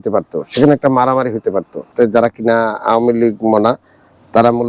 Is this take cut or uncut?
cut